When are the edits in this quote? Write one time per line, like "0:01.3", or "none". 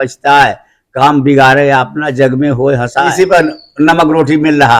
0:03.1